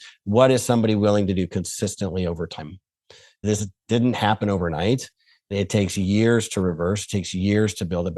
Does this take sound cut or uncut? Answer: cut